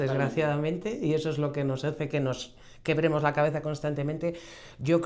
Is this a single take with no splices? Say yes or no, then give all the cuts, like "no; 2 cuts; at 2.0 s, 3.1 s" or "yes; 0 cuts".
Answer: yes; 0 cuts